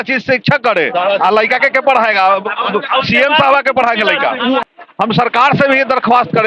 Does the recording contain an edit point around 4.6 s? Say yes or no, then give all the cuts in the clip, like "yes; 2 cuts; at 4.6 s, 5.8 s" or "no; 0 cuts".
yes; 1 cut; at 4.6 s